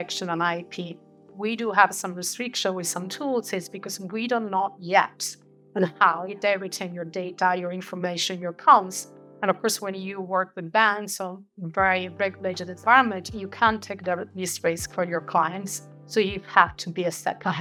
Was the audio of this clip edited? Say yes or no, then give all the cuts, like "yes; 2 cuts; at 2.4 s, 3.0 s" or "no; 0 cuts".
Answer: no; 0 cuts